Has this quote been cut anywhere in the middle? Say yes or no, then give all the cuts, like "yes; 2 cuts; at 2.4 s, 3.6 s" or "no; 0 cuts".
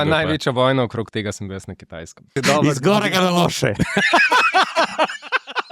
yes; 1 cut; at 2.3 s